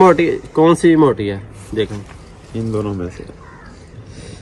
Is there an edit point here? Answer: no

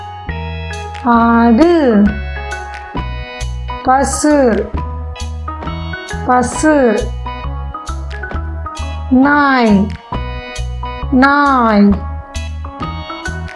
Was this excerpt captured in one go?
no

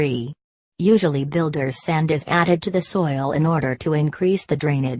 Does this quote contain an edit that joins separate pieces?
yes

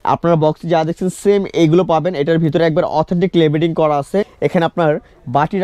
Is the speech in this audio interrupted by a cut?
yes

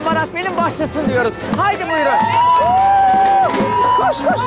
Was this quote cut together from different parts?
no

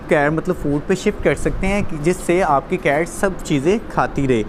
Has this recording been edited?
no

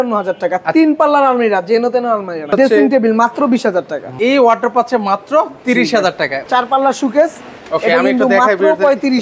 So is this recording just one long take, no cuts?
no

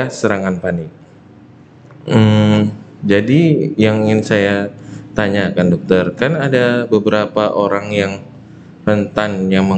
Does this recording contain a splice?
no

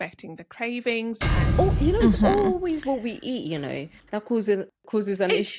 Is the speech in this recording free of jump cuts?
no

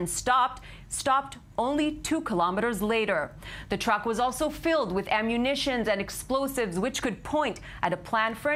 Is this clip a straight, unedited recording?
yes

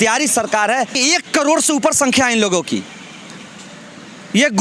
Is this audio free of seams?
no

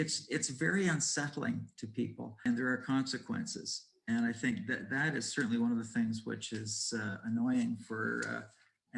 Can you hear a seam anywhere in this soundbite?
yes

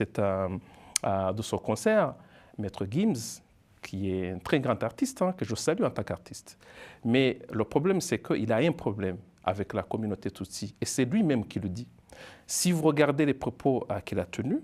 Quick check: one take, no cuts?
yes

